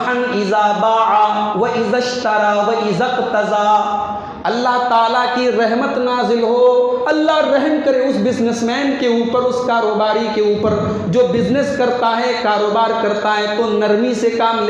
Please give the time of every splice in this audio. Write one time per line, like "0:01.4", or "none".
none